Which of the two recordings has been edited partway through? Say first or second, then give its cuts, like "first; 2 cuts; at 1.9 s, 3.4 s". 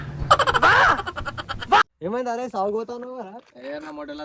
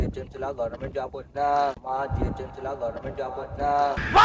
first; 1 cut; at 1.8 s